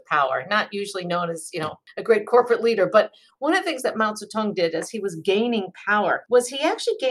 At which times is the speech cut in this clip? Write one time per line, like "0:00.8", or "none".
0:01.9
0:06.2